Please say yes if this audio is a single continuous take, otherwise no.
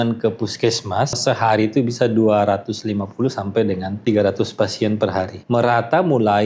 no